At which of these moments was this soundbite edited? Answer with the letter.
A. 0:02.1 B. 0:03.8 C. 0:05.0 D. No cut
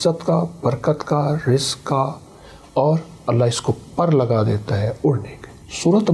D